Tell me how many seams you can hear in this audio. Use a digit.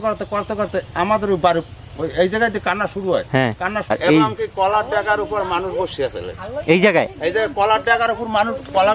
1